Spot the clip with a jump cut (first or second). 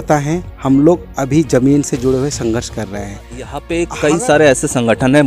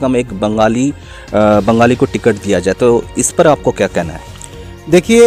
first